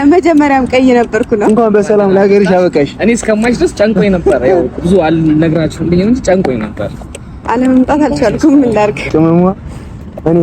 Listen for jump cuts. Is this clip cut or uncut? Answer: cut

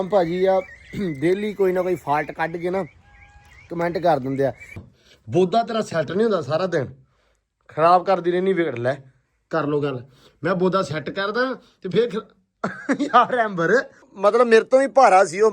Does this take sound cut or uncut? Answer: cut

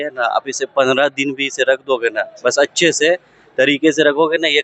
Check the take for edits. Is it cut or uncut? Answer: uncut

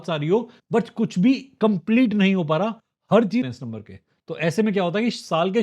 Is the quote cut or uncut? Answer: cut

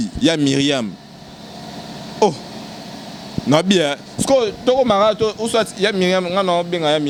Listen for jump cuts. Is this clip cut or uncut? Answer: uncut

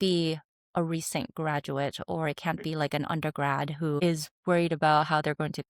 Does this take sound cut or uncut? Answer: uncut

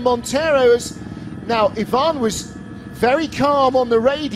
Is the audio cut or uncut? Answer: cut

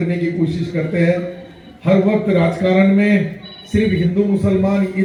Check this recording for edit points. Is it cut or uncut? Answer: uncut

